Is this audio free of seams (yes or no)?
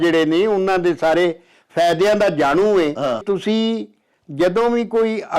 no